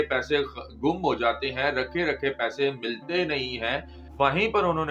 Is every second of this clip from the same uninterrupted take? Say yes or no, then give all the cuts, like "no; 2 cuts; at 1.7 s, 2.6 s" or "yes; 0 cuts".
no; 1 cut; at 4.0 s